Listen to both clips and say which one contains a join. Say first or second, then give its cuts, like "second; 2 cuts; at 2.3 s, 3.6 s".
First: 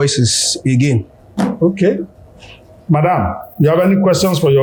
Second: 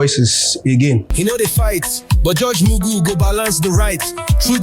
second; 1 cut; at 1.1 s